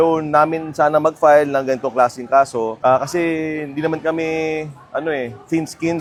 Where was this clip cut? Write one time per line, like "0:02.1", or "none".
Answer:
none